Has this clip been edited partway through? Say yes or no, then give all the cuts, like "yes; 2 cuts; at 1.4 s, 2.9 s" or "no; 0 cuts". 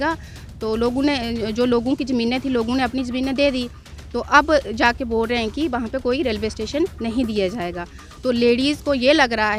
no; 0 cuts